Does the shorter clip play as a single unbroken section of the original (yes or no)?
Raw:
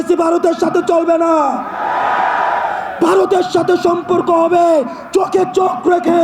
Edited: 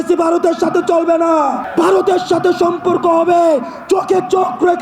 no